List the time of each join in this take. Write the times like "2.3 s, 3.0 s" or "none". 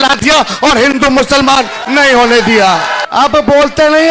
3.0 s